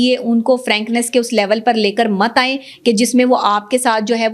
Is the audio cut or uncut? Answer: uncut